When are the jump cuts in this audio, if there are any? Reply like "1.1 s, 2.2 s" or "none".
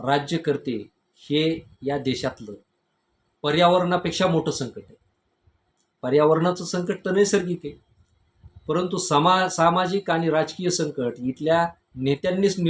none